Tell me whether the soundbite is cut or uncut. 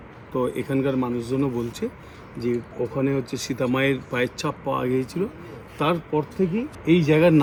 uncut